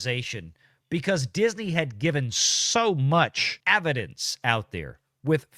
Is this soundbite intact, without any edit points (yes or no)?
no